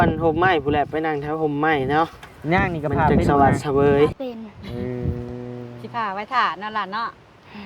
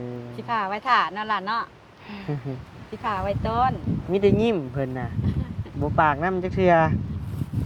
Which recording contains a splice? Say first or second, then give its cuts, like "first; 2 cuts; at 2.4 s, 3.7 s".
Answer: first; 1 cut; at 4.2 s